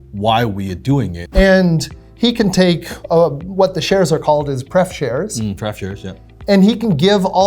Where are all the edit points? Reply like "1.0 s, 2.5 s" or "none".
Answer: 1.2 s